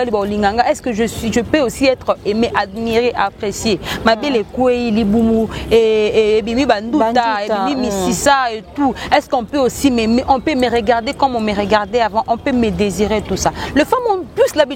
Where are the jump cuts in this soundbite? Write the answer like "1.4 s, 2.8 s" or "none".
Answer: none